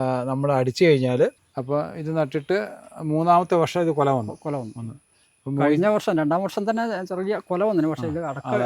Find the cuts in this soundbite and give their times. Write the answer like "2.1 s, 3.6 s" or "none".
1.5 s